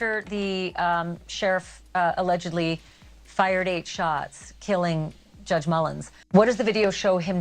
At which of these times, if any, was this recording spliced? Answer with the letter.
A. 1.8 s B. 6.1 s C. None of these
B